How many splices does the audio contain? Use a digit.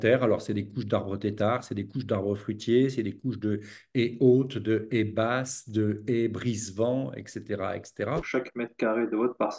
1